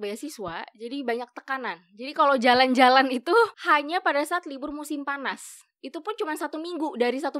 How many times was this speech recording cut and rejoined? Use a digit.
1